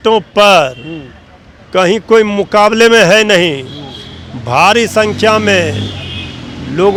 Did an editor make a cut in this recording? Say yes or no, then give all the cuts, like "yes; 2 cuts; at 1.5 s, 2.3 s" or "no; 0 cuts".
no; 0 cuts